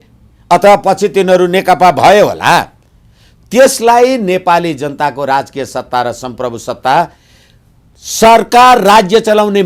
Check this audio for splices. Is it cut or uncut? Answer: uncut